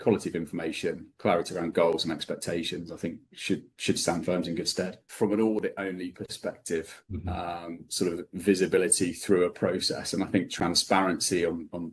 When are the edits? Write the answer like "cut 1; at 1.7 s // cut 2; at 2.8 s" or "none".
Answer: cut 1; at 5.0 s